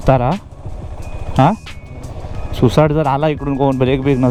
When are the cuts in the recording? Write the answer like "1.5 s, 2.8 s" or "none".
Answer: none